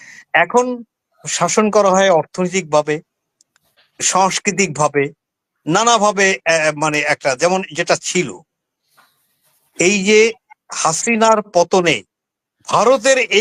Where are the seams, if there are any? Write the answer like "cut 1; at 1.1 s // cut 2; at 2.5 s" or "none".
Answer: none

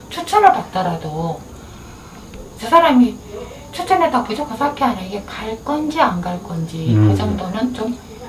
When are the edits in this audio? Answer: none

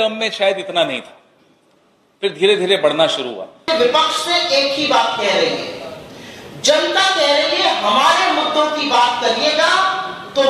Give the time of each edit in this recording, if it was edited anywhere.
cut 1; at 3.6 s

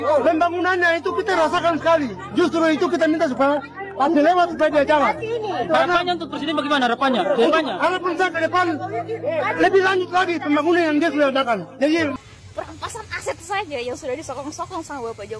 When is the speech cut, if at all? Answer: cut 1; at 11.9 s

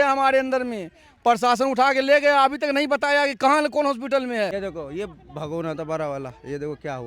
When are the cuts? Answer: cut 1; at 4.5 s

